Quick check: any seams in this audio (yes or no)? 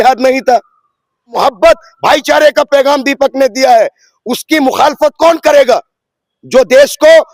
yes